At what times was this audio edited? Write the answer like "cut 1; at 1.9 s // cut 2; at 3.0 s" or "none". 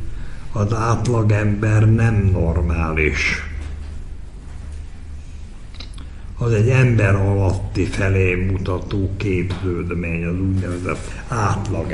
cut 1; at 11.0 s